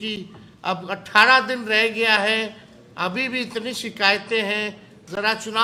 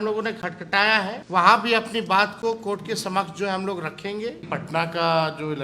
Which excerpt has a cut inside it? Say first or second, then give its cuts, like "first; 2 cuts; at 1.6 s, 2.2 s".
second; 2 cuts; at 1.2 s, 4.5 s